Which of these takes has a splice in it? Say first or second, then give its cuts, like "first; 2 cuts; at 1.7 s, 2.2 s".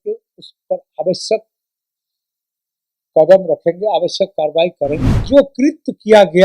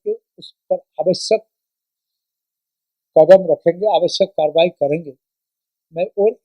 first; 1 cut; at 5.1 s